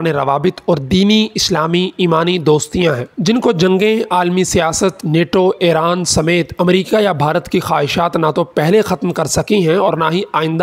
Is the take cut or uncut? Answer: uncut